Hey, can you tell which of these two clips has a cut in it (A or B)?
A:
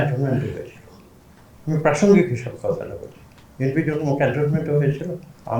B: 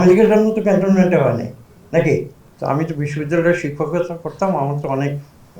B